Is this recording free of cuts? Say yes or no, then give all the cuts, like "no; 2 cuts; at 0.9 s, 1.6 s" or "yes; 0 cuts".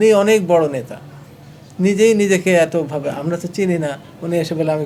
yes; 0 cuts